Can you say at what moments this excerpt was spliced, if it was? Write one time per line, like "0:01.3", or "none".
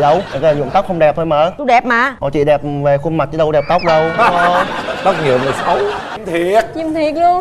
0:06.1